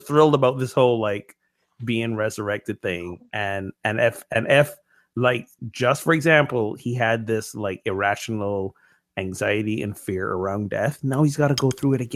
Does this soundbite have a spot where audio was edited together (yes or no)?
no